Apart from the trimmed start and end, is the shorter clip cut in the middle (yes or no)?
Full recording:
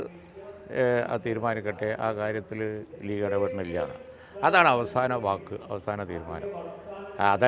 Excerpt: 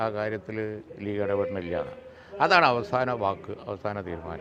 no